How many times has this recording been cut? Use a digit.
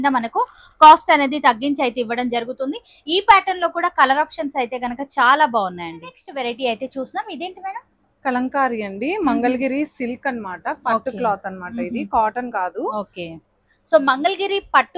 0